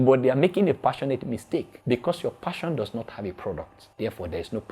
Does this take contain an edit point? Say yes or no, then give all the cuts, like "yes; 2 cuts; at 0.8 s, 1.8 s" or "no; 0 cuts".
yes; 2 cuts; at 1.7 s, 3.8 s